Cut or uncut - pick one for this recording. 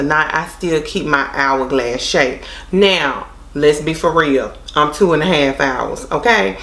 uncut